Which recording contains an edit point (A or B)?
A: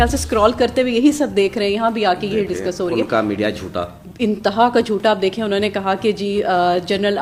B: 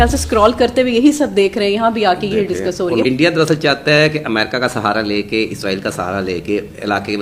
B